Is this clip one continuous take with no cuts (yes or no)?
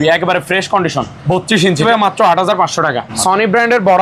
no